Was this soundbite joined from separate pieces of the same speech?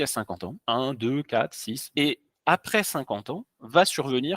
yes; 1 cut; at 1.9 s

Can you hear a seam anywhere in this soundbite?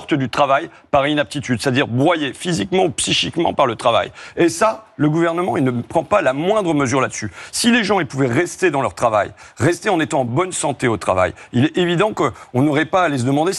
no; 0 cuts

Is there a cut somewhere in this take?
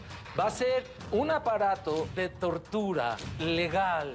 yes; 3 cuts; at 1.0 s, 2.1 s, 3.3 s

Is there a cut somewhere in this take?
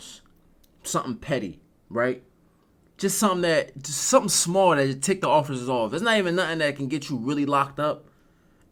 no; 0 cuts

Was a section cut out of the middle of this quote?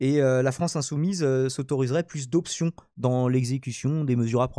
no; 0 cuts

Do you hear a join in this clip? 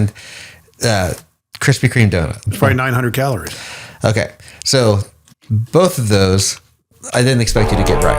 yes; 1 cut; at 2.4 s

